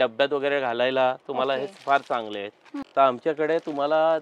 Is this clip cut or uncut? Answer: cut